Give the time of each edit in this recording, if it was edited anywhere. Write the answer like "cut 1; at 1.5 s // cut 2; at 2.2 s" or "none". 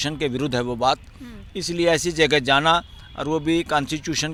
none